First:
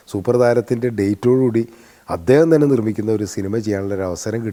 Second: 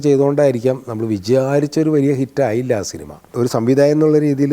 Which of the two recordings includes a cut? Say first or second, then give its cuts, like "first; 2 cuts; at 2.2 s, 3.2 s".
second; 1 cut; at 3.3 s